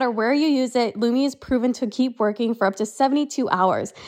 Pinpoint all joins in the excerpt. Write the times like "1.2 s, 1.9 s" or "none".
none